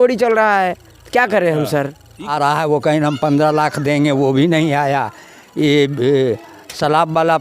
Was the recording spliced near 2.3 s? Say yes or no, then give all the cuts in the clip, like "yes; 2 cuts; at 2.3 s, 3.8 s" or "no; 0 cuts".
yes; 1 cut; at 2.3 s